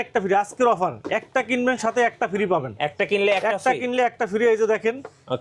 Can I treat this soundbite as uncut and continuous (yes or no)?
yes